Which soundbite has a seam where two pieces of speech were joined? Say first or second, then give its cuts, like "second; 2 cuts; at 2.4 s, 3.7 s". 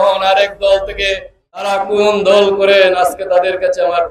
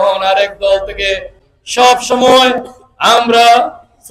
first; 1 cut; at 1.7 s